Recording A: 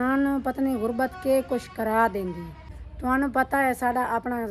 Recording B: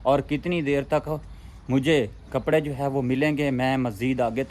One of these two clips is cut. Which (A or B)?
A